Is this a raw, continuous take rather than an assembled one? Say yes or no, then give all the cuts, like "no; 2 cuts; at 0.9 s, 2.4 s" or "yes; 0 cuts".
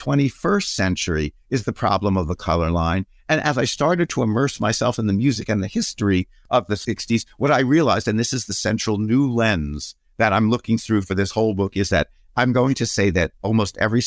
no; 1 cut; at 6.7 s